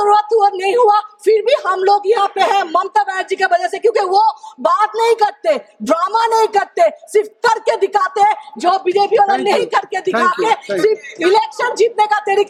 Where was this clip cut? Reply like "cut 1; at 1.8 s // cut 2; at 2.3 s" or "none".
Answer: none